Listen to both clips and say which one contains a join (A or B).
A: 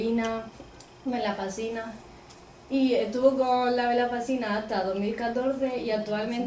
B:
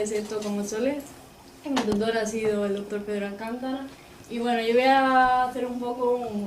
B